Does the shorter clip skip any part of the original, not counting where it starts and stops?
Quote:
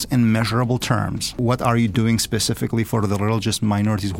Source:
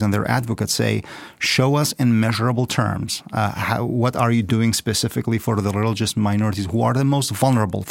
yes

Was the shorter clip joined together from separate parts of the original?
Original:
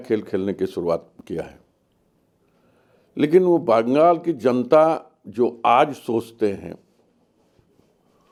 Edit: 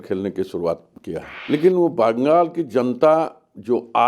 yes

